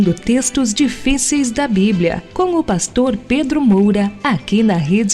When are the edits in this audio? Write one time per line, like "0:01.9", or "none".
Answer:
0:04.1